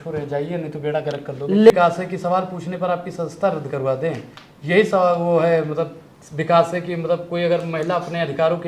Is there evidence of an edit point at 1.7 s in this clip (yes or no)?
yes